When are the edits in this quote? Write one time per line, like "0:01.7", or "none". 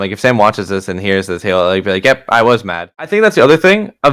0:02.9